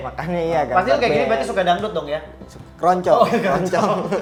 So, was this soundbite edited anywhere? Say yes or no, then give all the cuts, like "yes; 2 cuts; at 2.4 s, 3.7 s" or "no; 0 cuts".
no; 0 cuts